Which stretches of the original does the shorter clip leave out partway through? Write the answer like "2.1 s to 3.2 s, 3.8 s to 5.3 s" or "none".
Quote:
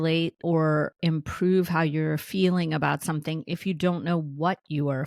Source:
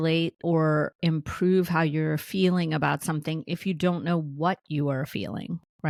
none